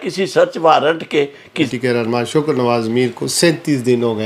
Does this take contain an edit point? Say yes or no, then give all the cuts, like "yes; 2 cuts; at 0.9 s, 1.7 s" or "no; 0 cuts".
yes; 1 cut; at 1.7 s